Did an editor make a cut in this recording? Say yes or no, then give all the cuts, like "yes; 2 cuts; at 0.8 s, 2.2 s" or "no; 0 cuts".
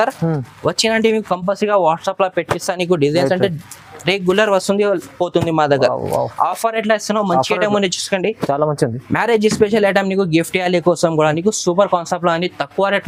no; 0 cuts